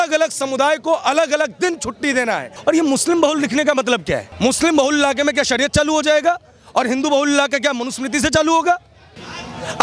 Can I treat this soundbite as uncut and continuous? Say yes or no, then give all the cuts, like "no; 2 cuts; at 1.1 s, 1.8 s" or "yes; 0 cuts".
no; 2 cuts; at 2.5 s, 4.3 s